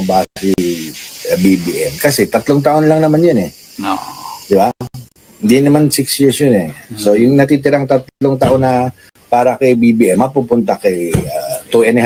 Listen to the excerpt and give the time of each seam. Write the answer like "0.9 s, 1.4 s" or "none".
none

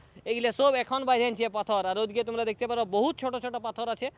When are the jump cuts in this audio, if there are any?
none

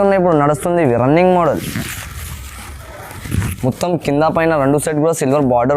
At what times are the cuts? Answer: 3.2 s

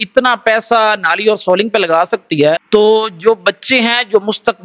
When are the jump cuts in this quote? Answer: 2.6 s

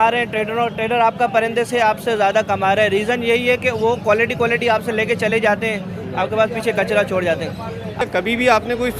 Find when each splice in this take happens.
8.0 s

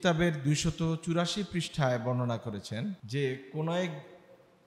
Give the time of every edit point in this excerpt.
3.0 s

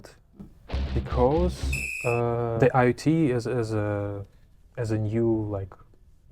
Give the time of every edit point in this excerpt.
2.5 s

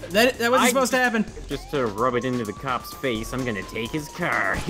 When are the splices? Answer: 1.5 s

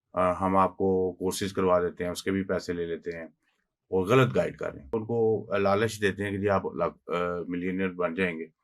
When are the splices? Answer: 4.9 s

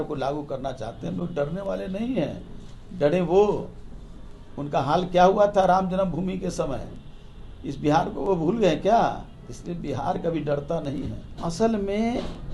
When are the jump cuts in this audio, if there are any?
none

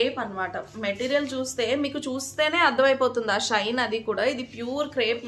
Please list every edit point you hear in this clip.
none

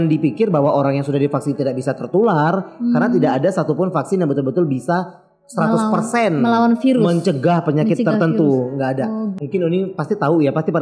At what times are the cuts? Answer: 9.4 s

